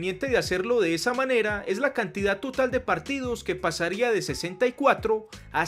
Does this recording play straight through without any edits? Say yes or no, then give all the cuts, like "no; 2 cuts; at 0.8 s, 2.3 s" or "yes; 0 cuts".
yes; 0 cuts